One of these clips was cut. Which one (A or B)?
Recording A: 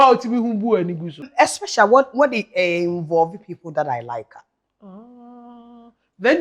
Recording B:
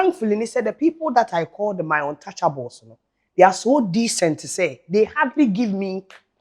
A